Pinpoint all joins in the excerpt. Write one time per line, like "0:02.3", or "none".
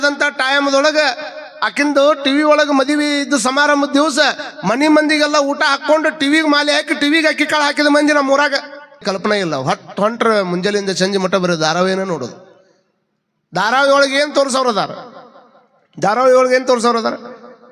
0:09.0